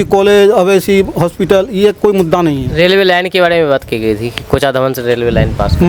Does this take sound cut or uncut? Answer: uncut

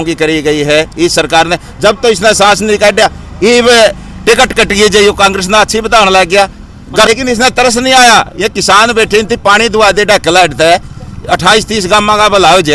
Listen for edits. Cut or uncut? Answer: cut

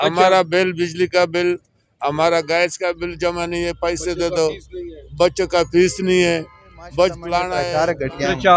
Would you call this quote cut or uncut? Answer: cut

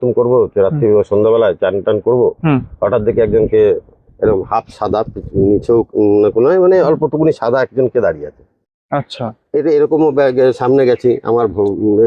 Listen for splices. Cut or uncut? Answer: uncut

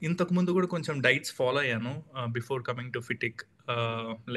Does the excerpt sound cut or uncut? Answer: uncut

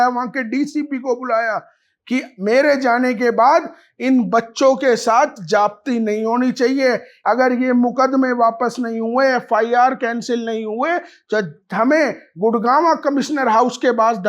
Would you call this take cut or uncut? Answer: cut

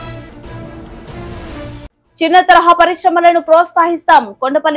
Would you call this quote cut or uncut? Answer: uncut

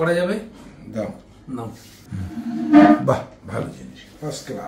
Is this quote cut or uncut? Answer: uncut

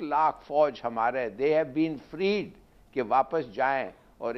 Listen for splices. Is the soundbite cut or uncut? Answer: uncut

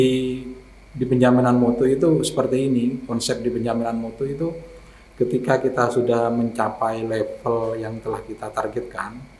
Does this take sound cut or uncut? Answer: uncut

